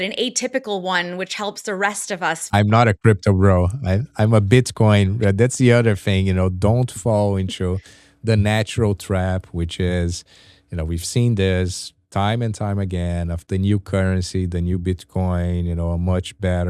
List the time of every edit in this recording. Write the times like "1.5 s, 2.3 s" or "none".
2.4 s